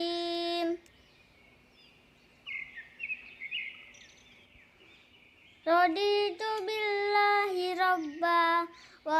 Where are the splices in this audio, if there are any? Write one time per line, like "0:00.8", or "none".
0:01.0
0:02.7